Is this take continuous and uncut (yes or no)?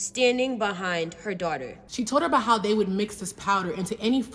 no